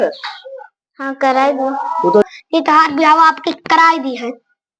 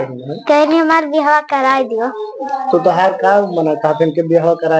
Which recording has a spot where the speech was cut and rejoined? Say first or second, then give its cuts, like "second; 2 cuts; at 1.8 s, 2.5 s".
first; 1 cut; at 2.3 s